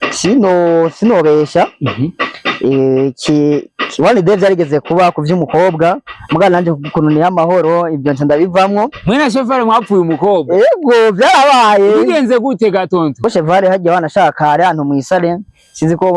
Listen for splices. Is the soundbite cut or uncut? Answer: cut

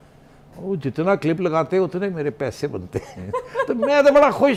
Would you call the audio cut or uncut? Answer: uncut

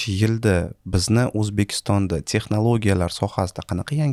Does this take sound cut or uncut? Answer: uncut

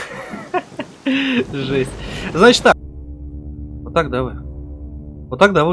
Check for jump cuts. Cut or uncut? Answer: cut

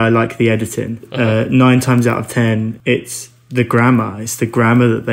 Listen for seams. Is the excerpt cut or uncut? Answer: cut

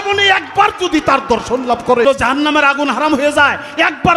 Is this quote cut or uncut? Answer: cut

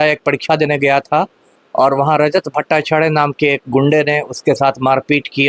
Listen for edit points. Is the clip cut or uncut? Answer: uncut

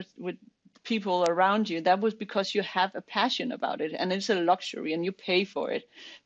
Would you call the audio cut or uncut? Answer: uncut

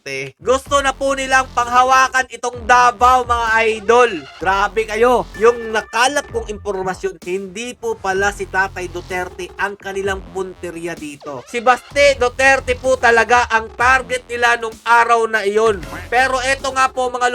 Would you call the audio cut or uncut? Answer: cut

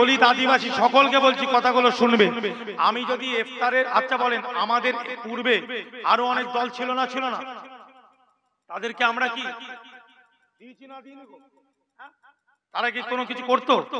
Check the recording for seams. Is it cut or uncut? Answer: uncut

